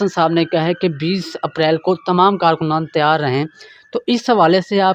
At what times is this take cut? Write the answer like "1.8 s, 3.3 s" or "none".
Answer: none

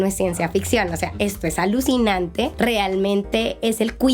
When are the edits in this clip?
2.5 s

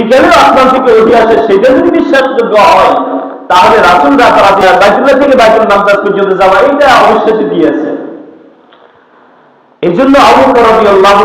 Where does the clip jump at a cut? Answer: 4.6 s

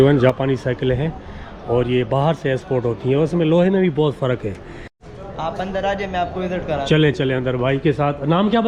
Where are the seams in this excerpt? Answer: 4.9 s

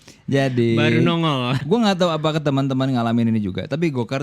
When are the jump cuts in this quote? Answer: 1.6 s

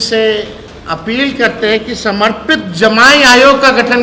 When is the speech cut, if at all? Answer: none

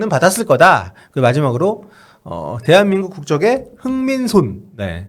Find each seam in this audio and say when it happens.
none

